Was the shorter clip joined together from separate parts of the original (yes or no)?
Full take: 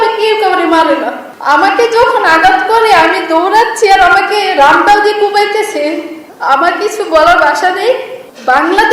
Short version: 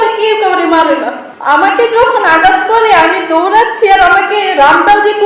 no